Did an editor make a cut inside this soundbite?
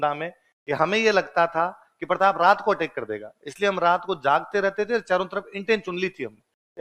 no; 0 cuts

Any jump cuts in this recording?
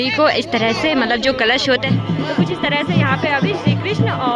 yes; 1 cut; at 1.8 s

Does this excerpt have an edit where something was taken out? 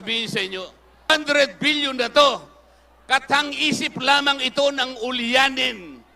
yes; 1 cut; at 1.1 s

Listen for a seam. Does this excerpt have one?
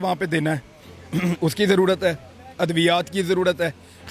no; 0 cuts

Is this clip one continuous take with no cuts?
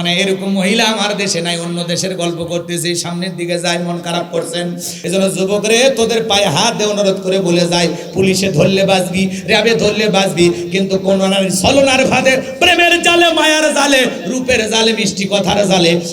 no; 1 cut; at 4.9 s

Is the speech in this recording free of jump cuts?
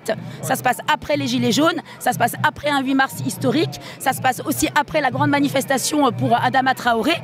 yes; 0 cuts

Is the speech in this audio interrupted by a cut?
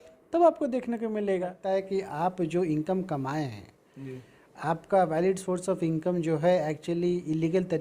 yes; 1 cut; at 1.6 s

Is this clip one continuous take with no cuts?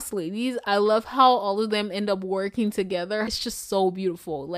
yes; 0 cuts

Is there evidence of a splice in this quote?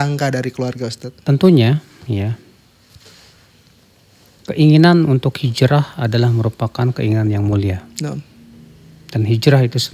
yes; 1 cut; at 1.1 s

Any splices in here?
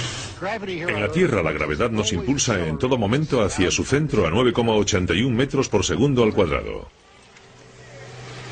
no; 0 cuts

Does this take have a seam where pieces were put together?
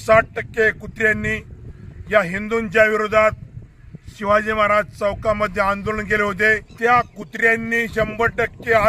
yes; 1 cut; at 6.7 s

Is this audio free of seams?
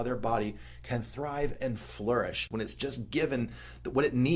no; 1 cut; at 2.5 s

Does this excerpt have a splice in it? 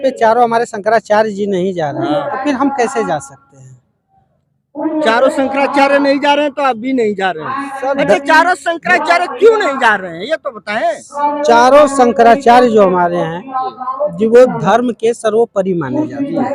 no; 0 cuts

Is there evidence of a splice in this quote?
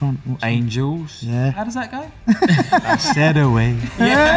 no; 0 cuts

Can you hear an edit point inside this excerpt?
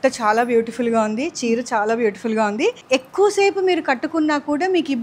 yes; 1 cut; at 2.8 s

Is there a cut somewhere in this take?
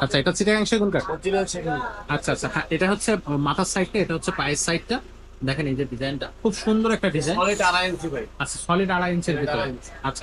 no; 0 cuts

